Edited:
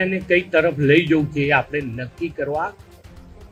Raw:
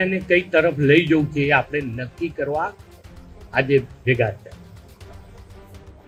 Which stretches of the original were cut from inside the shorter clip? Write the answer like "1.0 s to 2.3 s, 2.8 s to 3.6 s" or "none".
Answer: none